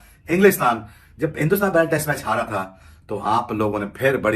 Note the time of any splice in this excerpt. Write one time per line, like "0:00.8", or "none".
none